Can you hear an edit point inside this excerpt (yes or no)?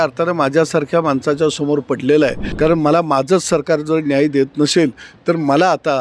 yes